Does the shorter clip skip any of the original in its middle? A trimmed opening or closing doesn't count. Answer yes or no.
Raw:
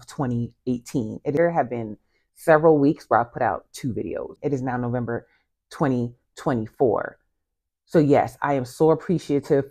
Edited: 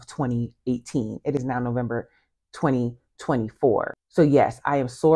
yes